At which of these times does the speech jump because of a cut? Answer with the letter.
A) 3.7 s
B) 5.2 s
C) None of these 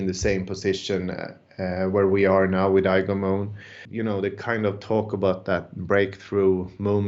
A